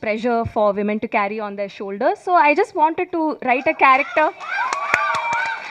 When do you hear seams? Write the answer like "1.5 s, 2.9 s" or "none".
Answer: none